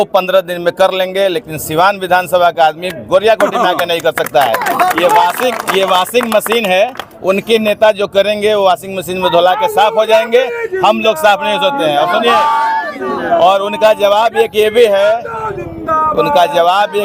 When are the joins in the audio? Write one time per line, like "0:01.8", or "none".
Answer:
none

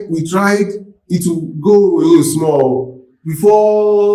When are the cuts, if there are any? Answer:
none

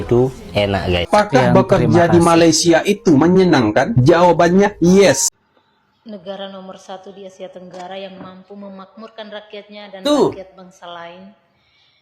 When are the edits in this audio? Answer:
0:01.1
0:05.3

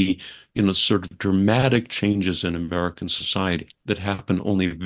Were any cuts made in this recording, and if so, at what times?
none

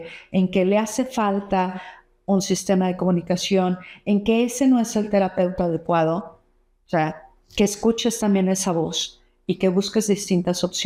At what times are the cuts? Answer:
none

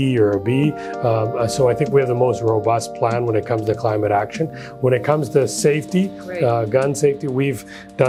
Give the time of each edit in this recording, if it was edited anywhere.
none

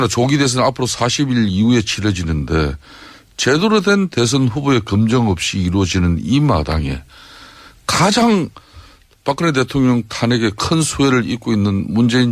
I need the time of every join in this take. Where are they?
none

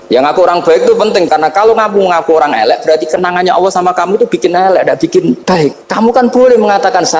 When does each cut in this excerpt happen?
0:01.3
0:05.6

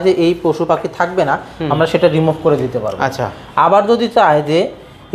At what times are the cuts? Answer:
none

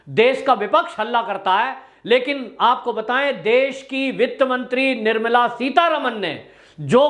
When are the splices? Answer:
none

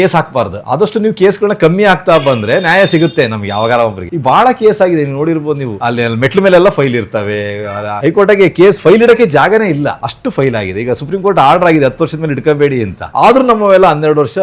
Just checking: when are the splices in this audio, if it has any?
none

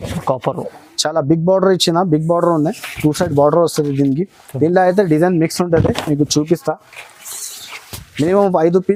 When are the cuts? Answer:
none

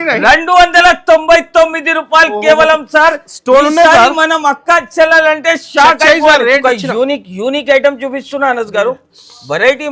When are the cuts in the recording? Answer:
0:06.6

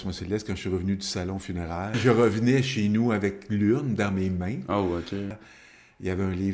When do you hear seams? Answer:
0:02.0
0:05.3

